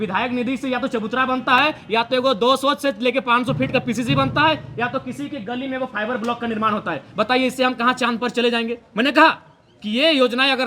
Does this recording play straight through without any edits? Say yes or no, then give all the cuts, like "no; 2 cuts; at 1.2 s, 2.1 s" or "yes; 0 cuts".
yes; 0 cuts